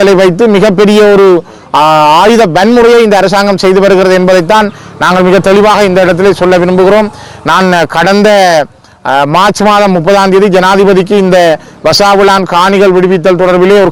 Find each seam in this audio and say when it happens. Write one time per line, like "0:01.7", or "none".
none